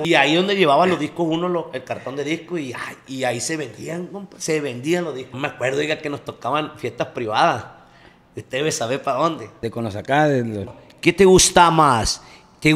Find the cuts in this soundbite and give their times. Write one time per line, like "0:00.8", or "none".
0:05.3
0:09.5
0:10.8